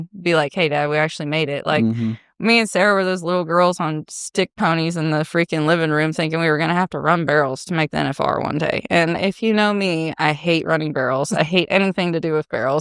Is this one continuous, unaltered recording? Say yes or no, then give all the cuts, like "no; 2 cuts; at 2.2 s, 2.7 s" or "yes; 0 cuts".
yes; 0 cuts